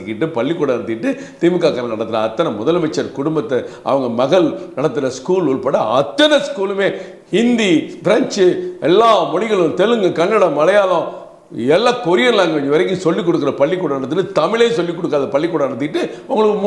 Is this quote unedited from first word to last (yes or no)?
yes